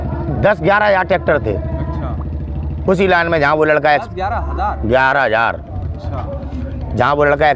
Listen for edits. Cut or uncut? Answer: uncut